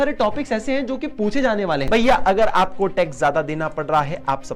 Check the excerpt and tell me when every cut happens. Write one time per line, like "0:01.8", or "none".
0:01.8